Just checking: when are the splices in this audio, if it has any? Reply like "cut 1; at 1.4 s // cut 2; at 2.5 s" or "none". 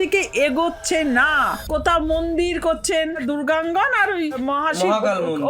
cut 1; at 1.5 s // cut 2; at 3.2 s // cut 3; at 4.4 s

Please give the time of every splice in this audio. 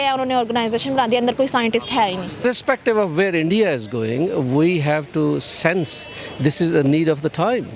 cut 1; at 2.4 s

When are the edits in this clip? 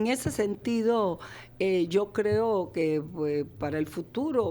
none

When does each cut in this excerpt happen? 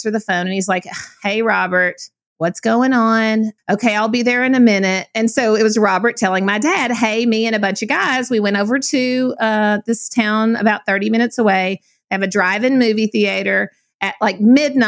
cut 1; at 3.6 s

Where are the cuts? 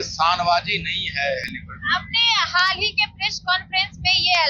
none

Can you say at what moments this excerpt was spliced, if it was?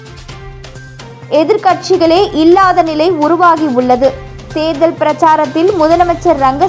cut 1; at 1.1 s

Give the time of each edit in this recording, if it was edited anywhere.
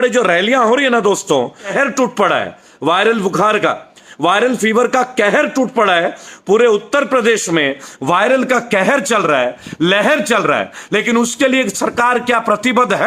cut 1; at 1.7 s

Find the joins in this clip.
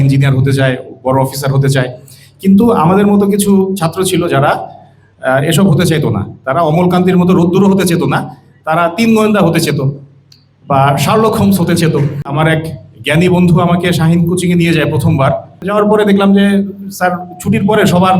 cut 1; at 12.3 s // cut 2; at 15.7 s

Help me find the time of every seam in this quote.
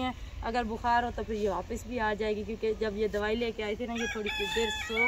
none

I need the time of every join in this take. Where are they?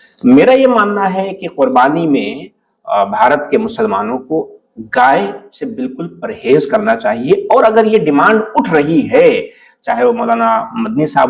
none

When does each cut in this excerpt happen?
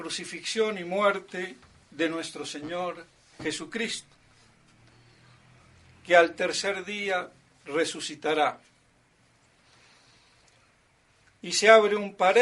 cut 1; at 6.1 s

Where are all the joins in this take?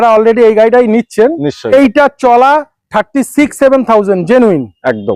cut 1; at 1.6 s

